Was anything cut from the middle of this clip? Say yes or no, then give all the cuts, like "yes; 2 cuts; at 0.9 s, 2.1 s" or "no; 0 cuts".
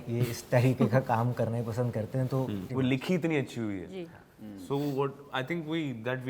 yes; 1 cut; at 2.7 s